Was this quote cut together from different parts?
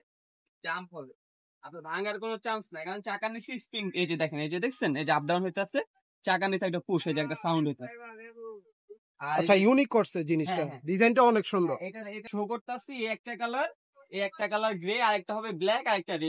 no; 0 cuts

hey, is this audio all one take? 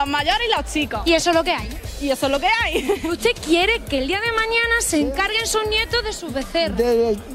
no; 1 cut; at 3.0 s

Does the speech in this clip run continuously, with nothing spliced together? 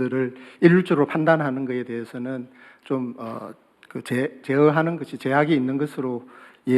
yes; 0 cuts

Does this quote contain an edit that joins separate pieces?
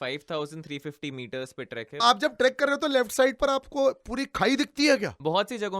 yes; 1 cut; at 2.0 s

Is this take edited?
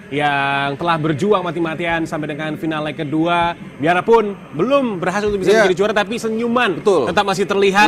no; 0 cuts

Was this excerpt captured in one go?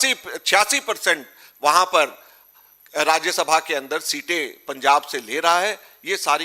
yes; 0 cuts

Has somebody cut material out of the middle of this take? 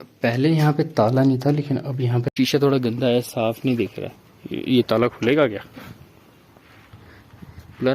yes; 1 cut; at 2.3 s

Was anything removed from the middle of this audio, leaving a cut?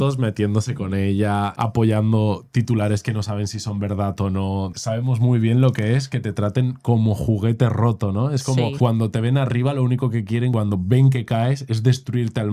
yes; 2 cuts; at 4.7 s, 10.5 s

